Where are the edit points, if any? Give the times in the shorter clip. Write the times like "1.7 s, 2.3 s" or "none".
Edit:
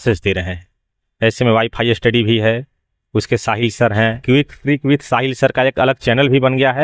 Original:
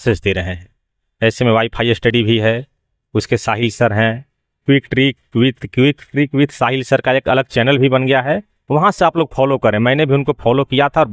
4.2 s